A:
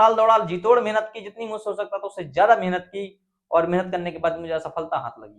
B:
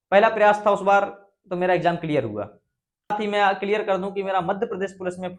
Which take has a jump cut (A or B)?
B